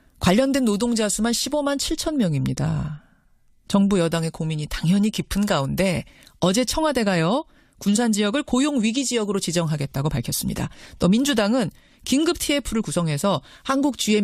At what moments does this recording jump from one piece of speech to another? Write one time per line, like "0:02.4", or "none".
0:09.1